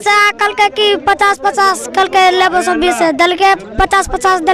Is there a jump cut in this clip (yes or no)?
no